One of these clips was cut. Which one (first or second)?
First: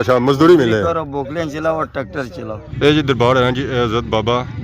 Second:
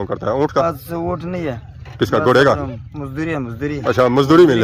first